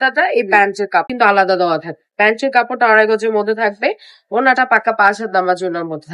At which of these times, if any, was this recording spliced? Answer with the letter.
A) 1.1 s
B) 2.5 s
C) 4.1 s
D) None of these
A